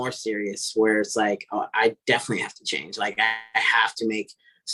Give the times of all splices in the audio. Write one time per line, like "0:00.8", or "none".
none

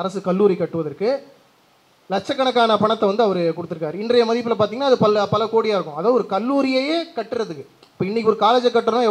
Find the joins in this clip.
none

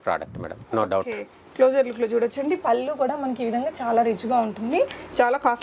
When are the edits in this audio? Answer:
none

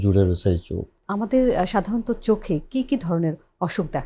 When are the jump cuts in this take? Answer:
0:01.0

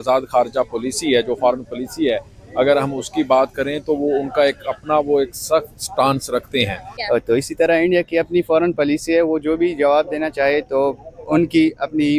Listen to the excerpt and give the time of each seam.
0:06.9

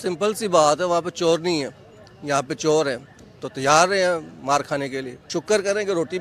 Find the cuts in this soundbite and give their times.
0:05.1

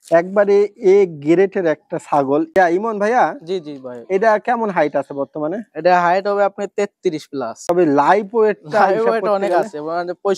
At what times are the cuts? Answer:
0:02.6
0:07.7

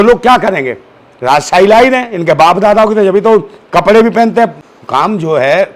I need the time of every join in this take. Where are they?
0:04.6

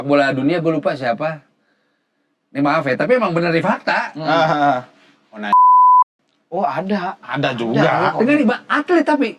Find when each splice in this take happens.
none

